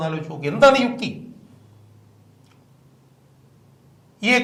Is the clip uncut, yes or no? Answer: yes